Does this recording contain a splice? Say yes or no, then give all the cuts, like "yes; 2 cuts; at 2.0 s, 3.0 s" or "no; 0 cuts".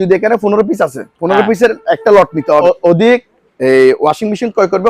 yes; 1 cut; at 2.6 s